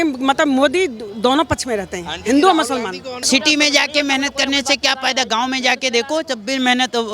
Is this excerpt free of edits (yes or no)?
no